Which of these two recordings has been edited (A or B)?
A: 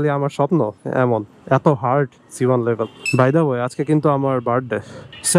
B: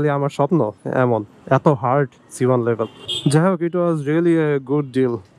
A